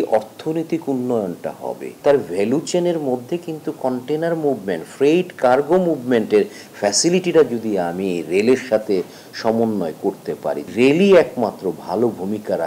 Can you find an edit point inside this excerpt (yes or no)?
yes